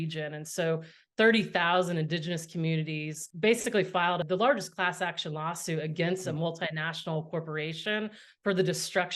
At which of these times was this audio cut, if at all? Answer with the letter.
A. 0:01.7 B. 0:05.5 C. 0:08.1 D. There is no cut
D